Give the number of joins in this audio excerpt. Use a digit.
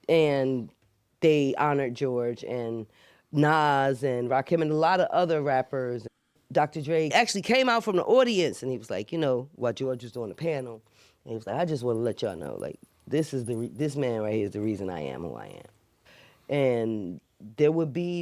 2